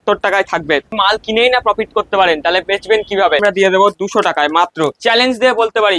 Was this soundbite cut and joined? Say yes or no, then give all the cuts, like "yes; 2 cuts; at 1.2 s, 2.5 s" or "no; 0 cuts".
yes; 3 cuts; at 0.9 s, 3.4 s, 5.0 s